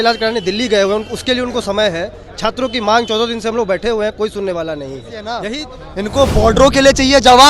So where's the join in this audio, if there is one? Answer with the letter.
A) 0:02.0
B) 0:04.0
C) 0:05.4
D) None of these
C